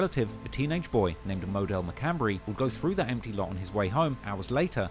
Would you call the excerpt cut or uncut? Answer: uncut